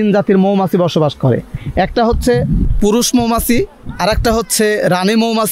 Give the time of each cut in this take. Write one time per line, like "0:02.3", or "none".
none